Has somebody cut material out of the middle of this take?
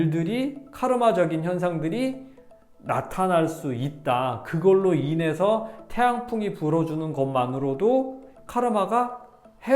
yes; 1 cut; at 8.3 s

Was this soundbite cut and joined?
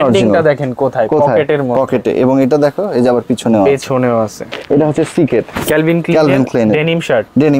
yes; 1 cut; at 4.5 s

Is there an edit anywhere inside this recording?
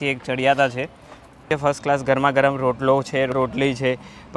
yes; 2 cuts; at 1.5 s, 3.3 s

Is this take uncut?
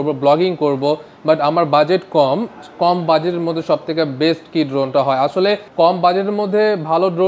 yes; 0 cuts

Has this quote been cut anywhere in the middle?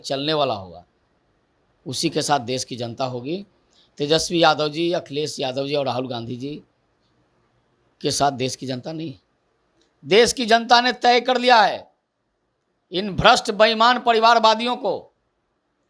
no; 0 cuts

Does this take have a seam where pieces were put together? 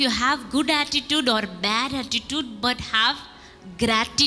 no; 0 cuts

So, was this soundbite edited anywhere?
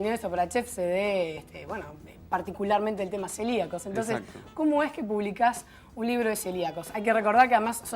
yes; 1 cut; at 1.8 s

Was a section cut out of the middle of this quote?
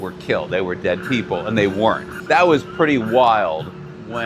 yes; 1 cut; at 2.1 s

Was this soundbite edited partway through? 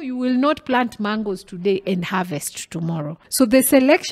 yes; 1 cut; at 3.2 s

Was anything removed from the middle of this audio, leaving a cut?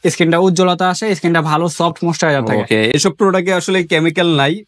no; 0 cuts

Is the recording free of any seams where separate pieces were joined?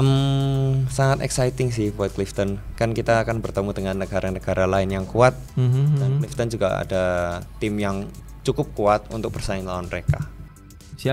yes; 0 cuts

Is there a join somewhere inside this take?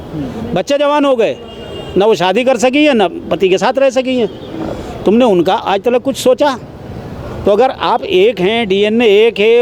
no; 0 cuts

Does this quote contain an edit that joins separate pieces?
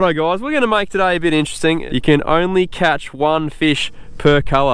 yes; 1 cut; at 1.8 s

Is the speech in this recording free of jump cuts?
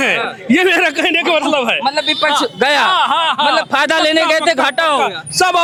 yes; 0 cuts

